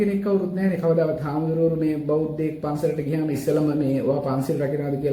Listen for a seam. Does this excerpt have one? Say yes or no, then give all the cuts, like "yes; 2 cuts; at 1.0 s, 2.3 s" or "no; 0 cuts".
no; 0 cuts